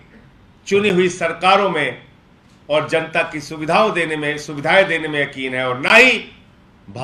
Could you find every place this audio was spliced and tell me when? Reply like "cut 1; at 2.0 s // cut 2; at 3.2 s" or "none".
none